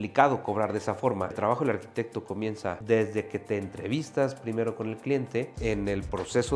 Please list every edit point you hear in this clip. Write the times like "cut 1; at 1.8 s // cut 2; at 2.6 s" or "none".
cut 1; at 1.3 s // cut 2; at 2.8 s // cut 3; at 5.5 s

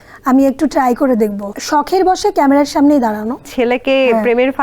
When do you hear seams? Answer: cut 1; at 1.5 s // cut 2; at 3.5 s

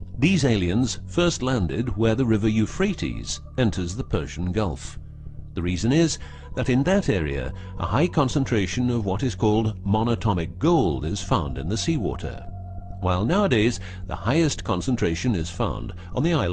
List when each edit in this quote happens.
none

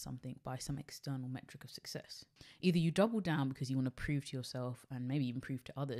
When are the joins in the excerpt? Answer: cut 1; at 2.2 s

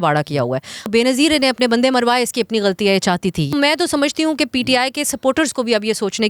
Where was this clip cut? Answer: cut 1; at 0.8 s // cut 2; at 3.5 s

